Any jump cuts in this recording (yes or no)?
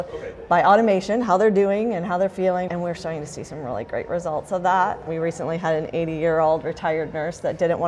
yes